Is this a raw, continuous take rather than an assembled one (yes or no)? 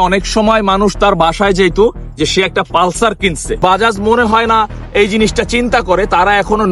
no